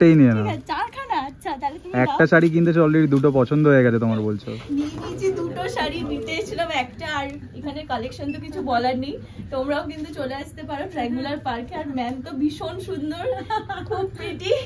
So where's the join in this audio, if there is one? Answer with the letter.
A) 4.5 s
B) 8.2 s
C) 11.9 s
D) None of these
A